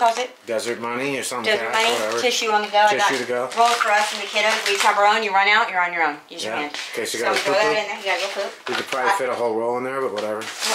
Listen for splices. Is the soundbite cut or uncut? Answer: uncut